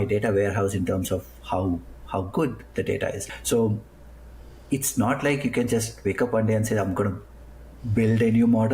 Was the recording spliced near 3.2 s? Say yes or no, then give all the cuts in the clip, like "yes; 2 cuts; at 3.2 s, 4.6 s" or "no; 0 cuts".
yes; 1 cut; at 3.2 s